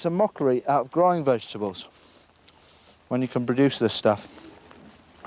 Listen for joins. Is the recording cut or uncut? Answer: uncut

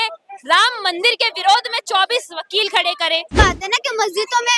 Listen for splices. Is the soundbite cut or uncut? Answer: cut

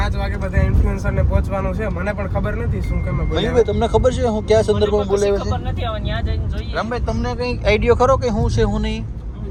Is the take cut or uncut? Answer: uncut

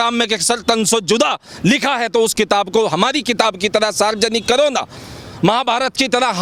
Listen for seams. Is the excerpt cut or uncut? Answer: uncut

